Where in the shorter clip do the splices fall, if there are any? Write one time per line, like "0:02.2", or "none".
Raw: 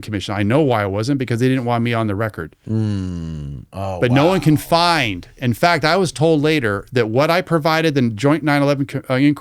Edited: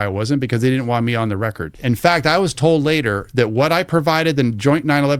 0:01.7